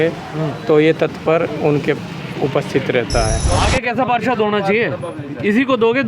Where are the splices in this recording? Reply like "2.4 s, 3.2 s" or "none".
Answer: 3.4 s